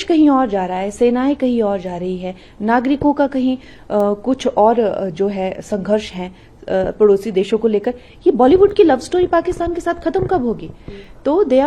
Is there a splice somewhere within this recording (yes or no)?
no